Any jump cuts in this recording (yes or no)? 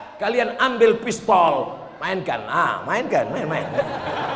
no